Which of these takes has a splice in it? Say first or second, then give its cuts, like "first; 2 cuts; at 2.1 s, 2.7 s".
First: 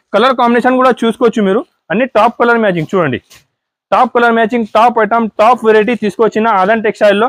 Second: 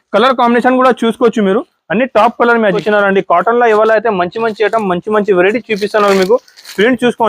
second; 1 cut; at 2.8 s